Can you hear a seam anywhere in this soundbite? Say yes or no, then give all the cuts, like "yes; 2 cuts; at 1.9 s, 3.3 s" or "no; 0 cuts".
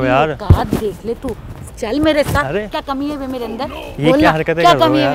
yes; 1 cut; at 1.5 s